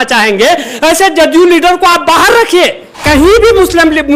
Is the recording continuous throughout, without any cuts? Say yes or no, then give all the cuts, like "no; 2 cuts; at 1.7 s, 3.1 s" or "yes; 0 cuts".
no; 1 cut; at 3.0 s